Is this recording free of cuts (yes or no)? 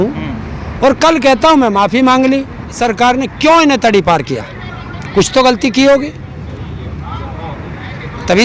no